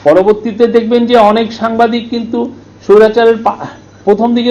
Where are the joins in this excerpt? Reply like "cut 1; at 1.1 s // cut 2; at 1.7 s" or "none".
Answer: none